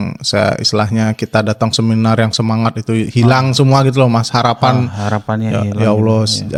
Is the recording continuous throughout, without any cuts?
yes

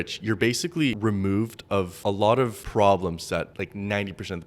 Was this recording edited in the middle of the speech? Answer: yes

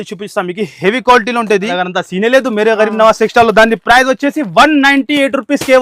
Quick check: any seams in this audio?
yes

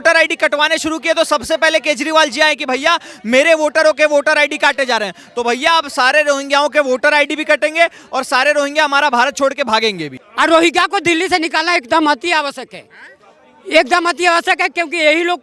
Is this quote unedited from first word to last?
no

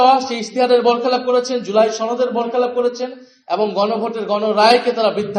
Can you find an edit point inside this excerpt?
no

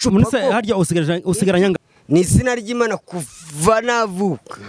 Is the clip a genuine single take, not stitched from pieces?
no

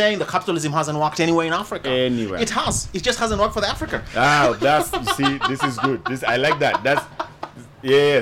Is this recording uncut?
yes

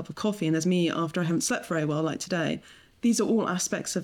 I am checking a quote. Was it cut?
yes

